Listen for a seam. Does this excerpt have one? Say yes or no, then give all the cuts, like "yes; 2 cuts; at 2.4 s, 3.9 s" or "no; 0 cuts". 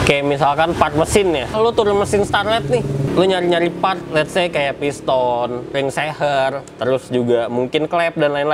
yes; 3 cuts; at 1.5 s, 3.1 s, 5.7 s